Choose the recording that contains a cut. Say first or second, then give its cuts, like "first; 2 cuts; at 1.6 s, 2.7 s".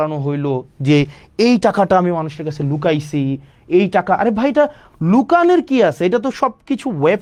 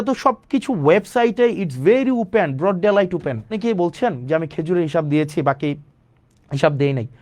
second; 1 cut; at 3.6 s